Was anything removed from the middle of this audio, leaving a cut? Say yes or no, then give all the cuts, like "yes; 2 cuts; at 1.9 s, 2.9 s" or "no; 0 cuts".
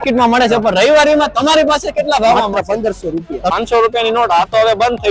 yes; 1 cut; at 3.5 s